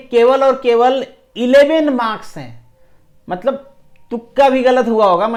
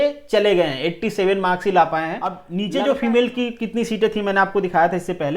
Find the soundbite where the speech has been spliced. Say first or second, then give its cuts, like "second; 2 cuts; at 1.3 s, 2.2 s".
second; 1 cut; at 2.5 s